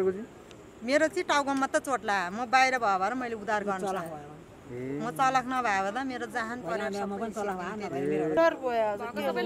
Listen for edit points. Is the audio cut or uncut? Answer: cut